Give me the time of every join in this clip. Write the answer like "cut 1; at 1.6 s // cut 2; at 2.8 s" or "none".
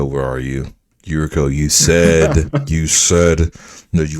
none